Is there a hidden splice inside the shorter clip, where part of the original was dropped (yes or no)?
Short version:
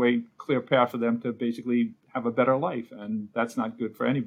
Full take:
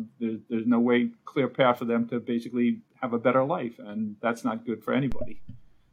no